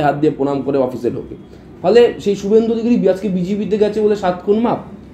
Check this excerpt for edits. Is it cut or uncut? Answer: uncut